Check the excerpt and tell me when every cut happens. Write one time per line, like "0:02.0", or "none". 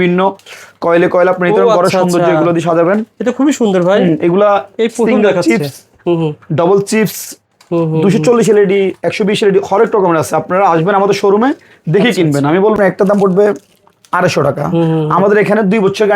0:12.7